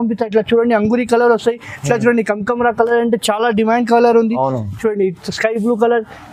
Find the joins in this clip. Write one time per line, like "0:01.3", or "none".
none